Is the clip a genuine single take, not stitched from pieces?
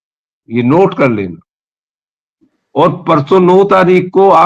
yes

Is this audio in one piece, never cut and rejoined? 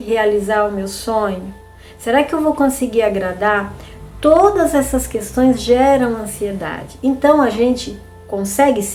yes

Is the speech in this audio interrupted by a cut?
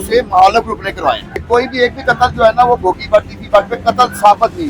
yes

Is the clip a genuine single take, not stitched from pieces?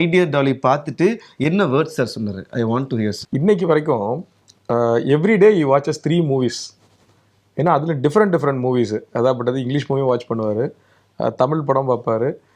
no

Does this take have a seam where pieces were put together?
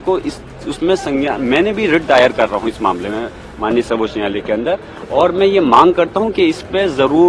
no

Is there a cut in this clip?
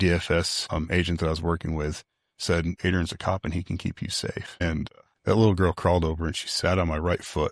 yes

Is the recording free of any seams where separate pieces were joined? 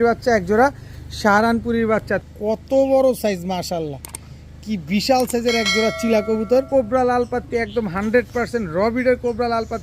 no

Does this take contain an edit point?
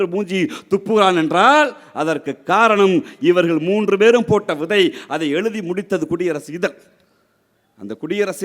no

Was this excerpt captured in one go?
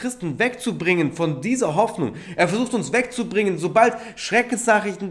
yes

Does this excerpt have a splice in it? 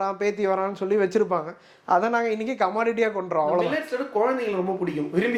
no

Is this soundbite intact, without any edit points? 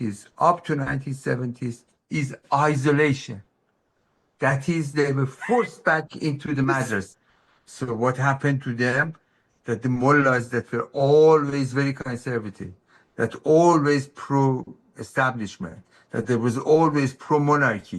no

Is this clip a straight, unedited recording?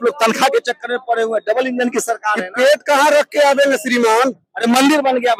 yes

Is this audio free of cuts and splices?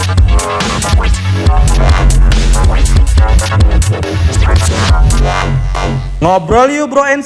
yes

